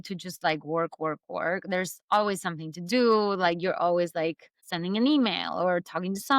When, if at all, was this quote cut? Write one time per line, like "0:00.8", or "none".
0:04.4

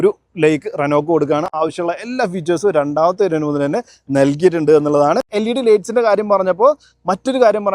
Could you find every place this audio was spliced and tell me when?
none

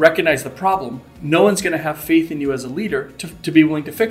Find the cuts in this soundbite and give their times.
none

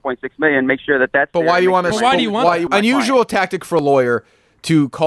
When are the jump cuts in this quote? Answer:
0:02.6

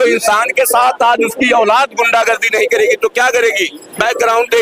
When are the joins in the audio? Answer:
none

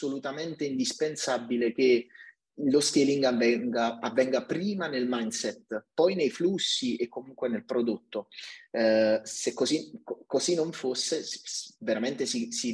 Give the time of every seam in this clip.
none

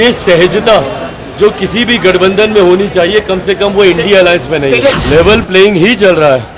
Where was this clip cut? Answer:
0:05.0

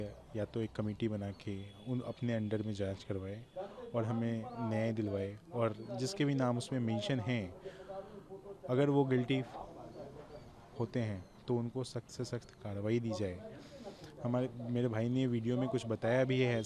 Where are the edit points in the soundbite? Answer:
none

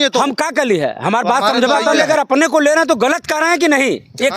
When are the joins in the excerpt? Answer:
0:02.0

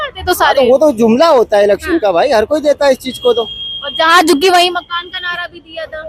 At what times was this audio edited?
none

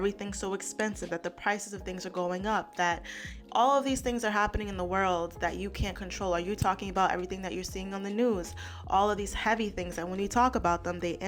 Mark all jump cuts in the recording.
none

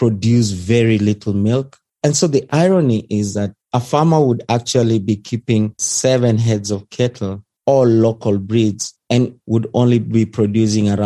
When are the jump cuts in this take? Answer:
0:01.8
0:05.9
0:09.4

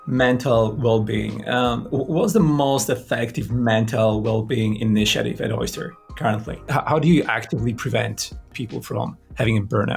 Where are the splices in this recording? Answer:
0:06.5
0:08.5

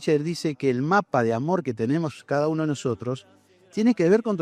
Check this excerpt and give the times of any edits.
none

